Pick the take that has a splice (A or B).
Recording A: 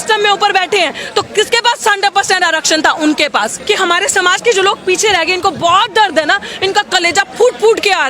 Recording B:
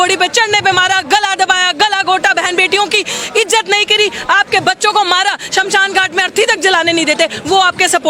A